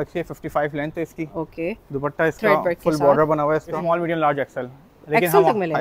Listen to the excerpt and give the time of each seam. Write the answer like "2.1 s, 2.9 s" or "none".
3.8 s

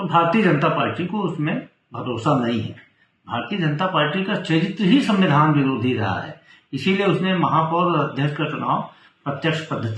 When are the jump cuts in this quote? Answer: none

